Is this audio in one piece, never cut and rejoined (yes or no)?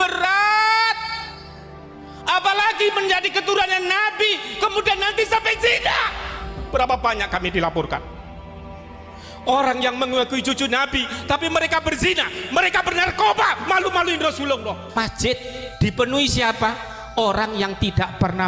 no